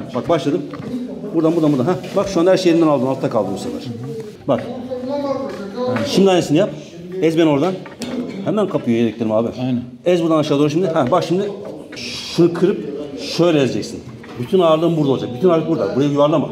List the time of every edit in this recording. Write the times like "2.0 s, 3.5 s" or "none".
4.3 s, 12.1 s